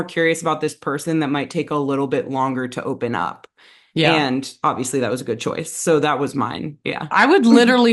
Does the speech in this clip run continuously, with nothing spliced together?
yes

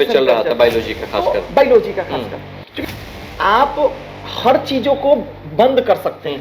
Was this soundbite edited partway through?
yes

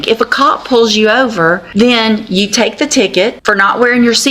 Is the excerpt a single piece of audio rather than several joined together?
no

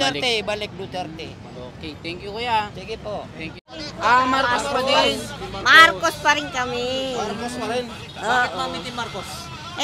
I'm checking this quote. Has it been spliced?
yes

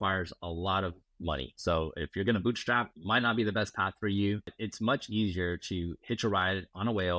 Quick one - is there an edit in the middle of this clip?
yes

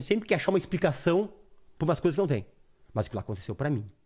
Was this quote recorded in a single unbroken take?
yes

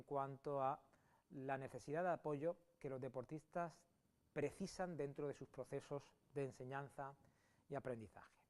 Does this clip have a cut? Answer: yes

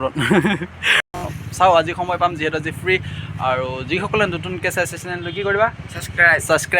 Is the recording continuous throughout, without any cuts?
no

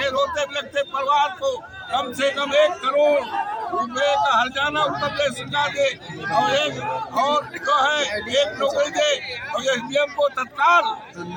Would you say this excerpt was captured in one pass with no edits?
yes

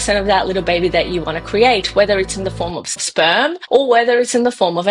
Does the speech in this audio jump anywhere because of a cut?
yes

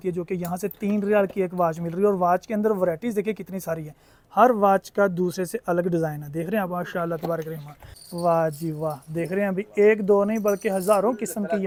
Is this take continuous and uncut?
yes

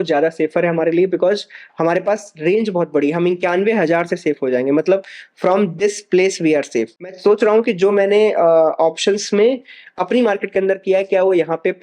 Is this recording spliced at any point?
yes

